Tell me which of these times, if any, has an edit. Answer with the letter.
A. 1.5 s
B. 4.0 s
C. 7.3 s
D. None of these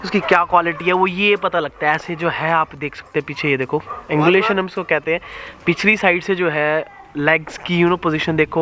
D